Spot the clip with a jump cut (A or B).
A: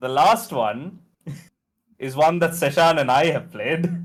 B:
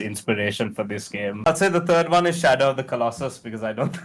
B